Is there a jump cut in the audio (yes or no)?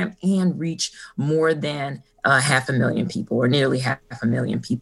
no